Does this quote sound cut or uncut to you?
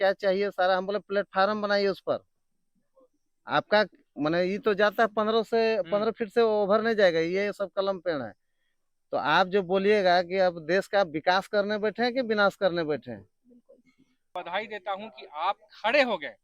cut